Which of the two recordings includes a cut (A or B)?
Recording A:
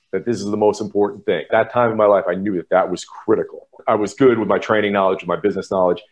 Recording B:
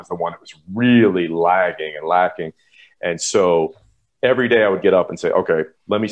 A